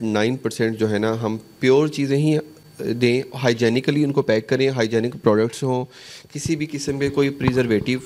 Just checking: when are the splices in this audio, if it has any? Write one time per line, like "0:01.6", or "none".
none